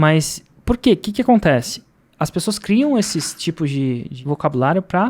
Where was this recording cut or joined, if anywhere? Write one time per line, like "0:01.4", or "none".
0:04.1